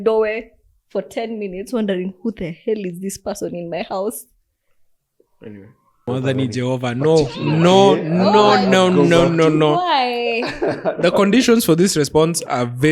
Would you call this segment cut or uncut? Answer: cut